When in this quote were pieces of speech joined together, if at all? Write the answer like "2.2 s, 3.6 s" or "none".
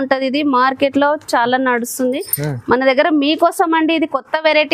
none

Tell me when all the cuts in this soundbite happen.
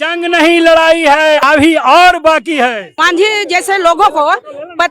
1.4 s, 2.9 s

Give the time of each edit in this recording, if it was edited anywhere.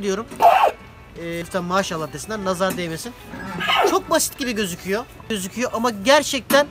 1.4 s, 5.4 s

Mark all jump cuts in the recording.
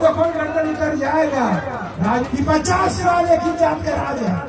2.3 s

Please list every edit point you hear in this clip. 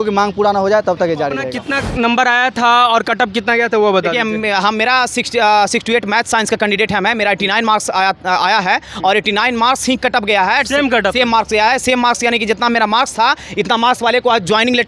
1.6 s

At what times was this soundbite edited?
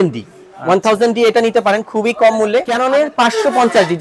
2.7 s

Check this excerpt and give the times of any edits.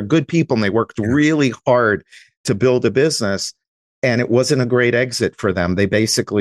none

